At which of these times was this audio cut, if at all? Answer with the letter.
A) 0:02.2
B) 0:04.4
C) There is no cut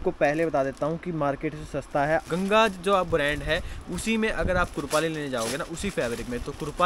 A